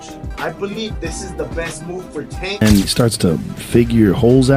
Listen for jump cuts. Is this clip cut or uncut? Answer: cut